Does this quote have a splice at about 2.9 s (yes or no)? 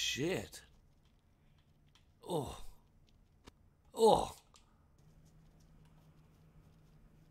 no